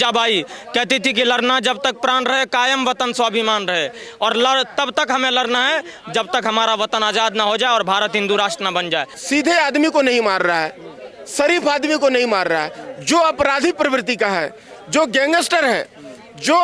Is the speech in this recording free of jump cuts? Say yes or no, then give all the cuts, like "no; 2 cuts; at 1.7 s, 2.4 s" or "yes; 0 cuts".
no; 1 cut; at 9.1 s